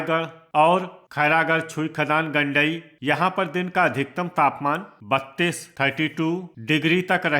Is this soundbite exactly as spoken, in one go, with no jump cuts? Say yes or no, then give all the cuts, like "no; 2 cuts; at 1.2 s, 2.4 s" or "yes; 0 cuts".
no; 2 cuts; at 1.0 s, 2.9 s